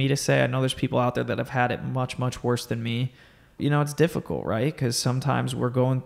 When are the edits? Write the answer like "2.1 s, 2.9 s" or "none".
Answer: 3.5 s